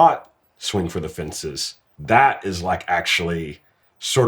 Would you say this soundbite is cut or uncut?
cut